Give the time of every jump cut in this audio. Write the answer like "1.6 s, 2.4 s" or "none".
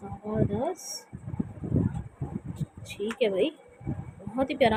none